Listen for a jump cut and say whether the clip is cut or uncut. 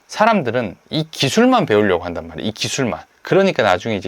cut